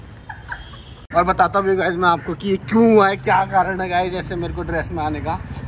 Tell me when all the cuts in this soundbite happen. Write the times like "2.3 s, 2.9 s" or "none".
0.9 s